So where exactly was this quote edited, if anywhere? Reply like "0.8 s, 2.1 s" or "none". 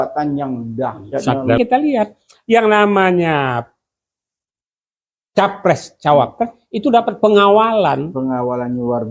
1.6 s